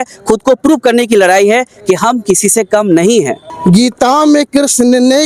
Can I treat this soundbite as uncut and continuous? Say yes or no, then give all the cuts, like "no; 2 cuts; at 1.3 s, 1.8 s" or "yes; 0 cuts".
no; 1 cut; at 3.4 s